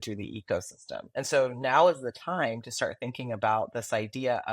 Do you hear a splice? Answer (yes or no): yes